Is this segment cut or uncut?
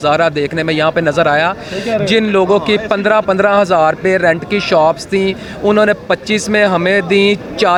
uncut